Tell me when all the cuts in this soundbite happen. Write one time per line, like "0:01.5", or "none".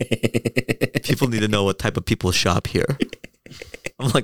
none